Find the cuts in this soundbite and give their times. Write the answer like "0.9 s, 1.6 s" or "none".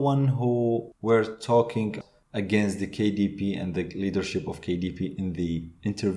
0.9 s, 1.9 s